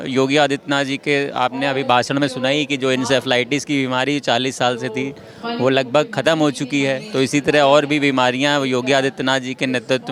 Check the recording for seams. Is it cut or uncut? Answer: uncut